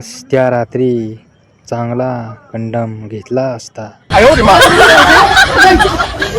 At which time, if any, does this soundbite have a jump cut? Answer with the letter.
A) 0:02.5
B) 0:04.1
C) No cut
B